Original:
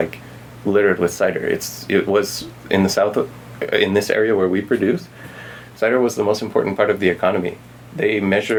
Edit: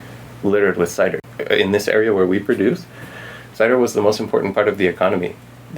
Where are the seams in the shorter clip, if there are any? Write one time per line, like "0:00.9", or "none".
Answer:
0:01.2